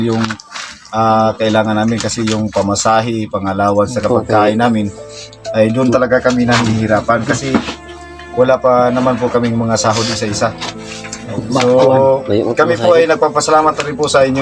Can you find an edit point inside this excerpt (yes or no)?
no